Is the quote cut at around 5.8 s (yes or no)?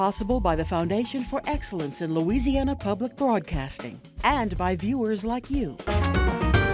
yes